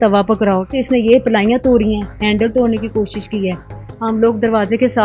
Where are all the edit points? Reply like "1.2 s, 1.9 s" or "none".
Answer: none

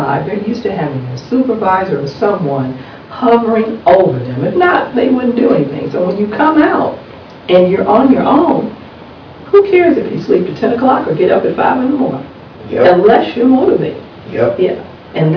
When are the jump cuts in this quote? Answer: none

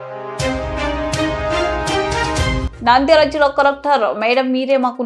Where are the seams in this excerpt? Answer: 2.6 s

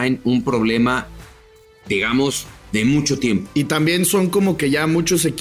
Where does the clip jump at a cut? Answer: 3.5 s

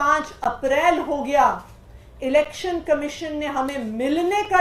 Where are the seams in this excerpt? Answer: none

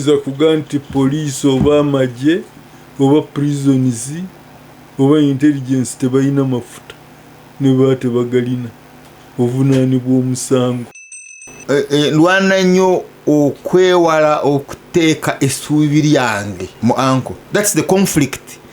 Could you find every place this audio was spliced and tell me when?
10.9 s, 16.7 s, 17.4 s

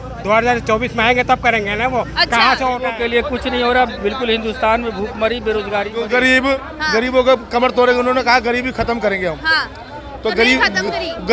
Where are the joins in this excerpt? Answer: 2.9 s, 6.0 s

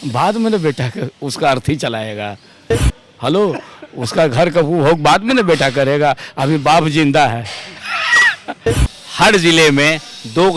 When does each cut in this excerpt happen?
8.7 s

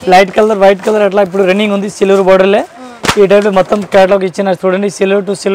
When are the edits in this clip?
none

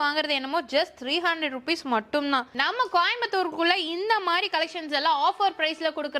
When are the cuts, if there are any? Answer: 2.5 s

